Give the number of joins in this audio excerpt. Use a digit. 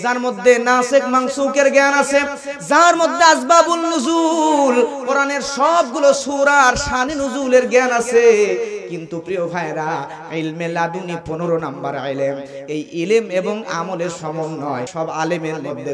1